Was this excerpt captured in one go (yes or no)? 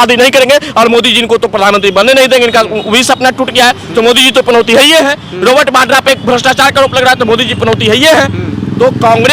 yes